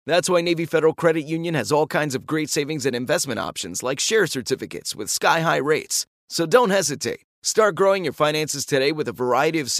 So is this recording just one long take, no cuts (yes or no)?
yes